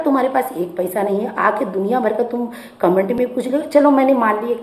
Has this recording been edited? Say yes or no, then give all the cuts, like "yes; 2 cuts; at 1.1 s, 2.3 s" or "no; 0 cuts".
no; 0 cuts